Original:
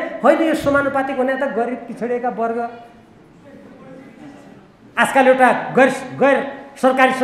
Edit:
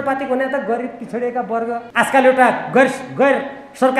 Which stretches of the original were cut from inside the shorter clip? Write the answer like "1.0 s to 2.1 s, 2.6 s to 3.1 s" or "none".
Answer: 2.7 s to 4.9 s